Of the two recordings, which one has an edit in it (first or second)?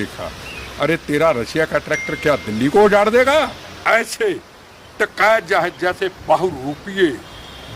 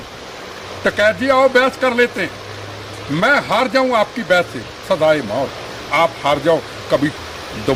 first